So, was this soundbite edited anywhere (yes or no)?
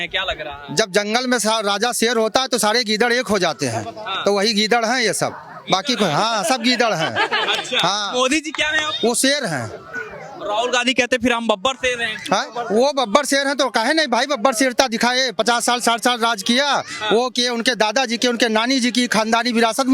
no